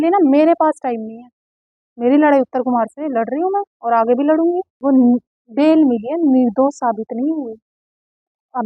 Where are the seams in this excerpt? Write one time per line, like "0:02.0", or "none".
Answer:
0:04.7